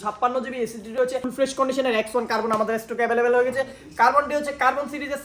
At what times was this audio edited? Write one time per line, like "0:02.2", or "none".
0:01.3